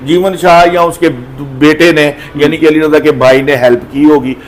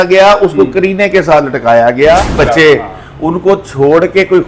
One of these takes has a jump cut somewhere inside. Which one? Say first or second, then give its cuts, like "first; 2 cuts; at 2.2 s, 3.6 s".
second; 1 cut; at 2.4 s